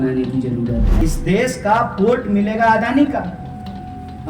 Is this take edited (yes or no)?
yes